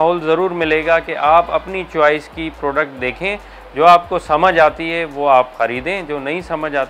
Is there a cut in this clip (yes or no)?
no